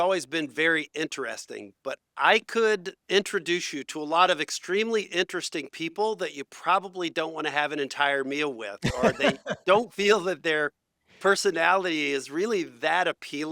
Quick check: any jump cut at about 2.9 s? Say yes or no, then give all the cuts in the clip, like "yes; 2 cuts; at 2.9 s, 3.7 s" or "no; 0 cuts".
yes; 1 cut; at 2.9 s